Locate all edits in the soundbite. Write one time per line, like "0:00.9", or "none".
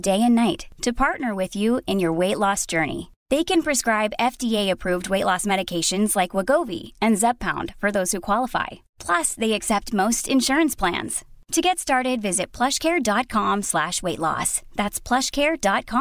none